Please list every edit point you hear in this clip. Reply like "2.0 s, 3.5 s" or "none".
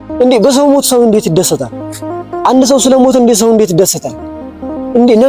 none